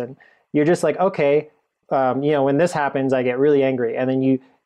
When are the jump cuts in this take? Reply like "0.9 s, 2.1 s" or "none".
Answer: none